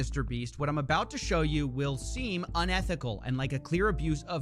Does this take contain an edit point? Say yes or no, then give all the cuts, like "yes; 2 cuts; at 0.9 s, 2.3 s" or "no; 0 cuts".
no; 0 cuts